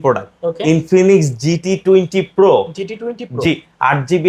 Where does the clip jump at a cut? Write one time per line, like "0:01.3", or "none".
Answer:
none